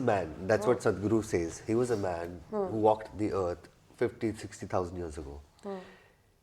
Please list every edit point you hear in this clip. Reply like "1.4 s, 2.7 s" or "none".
none